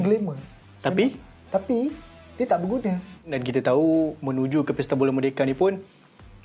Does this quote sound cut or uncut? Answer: cut